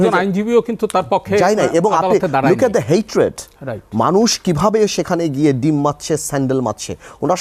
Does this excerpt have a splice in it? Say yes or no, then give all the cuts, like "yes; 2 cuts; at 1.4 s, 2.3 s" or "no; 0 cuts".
no; 0 cuts